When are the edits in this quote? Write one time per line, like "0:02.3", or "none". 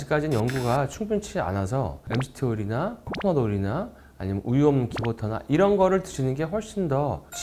none